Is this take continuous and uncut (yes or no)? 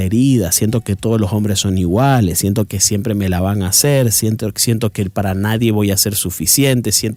yes